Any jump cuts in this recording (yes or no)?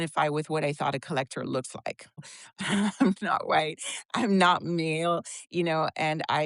yes